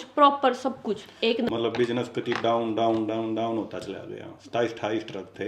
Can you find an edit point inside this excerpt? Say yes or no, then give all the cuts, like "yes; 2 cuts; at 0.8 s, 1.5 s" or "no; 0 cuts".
yes; 1 cut; at 1.5 s